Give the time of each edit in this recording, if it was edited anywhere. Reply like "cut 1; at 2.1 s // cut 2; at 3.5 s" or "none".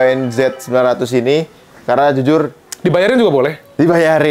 none